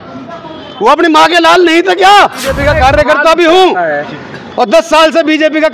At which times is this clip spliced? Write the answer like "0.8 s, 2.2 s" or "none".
2.5 s